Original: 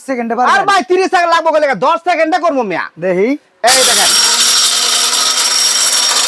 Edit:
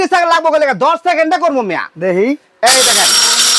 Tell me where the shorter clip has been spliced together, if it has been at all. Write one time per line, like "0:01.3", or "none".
none